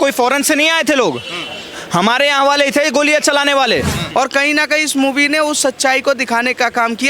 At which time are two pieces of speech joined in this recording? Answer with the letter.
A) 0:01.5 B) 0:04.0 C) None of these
B